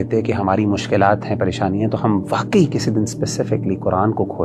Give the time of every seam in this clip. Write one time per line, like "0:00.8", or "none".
none